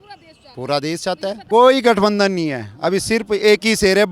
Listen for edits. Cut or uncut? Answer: cut